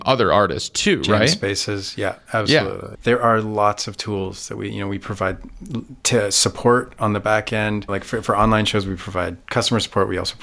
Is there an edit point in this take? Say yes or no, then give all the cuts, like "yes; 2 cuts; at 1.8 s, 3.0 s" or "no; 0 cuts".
yes; 2 cuts; at 2.9 s, 8.0 s